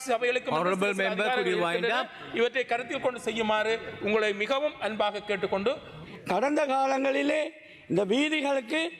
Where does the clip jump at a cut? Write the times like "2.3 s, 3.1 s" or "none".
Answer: 6.0 s